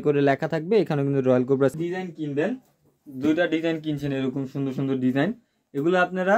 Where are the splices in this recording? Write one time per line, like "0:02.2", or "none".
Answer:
0:01.7